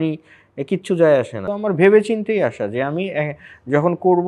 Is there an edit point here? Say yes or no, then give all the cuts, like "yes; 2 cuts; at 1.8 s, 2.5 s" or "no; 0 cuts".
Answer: yes; 1 cut; at 1.4 s